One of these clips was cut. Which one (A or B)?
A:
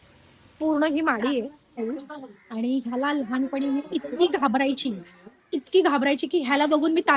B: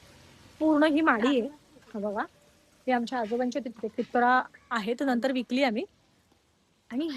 A